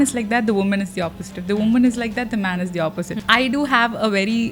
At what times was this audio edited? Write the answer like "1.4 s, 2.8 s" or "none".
3.2 s